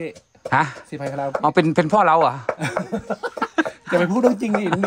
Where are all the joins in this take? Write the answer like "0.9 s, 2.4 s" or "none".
none